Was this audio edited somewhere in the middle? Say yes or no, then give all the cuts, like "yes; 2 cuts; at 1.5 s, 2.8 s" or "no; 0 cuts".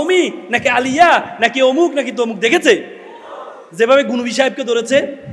no; 0 cuts